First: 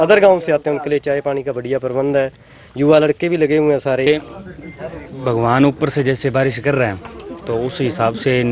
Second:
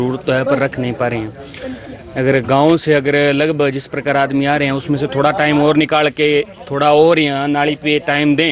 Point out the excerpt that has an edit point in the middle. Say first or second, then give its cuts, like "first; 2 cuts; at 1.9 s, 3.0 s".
first; 1 cut; at 4.1 s